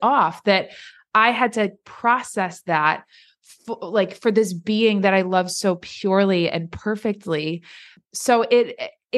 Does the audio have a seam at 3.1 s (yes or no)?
no